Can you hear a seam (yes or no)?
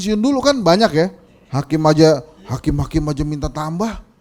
no